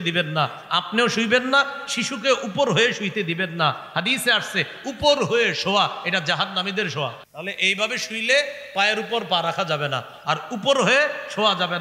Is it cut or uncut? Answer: cut